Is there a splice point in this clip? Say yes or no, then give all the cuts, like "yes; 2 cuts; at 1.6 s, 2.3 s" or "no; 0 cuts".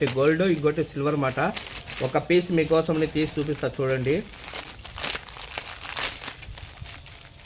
no; 0 cuts